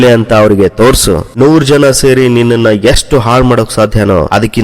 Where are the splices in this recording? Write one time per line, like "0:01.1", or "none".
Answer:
0:01.3

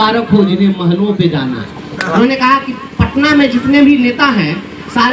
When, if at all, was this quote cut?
0:02.2

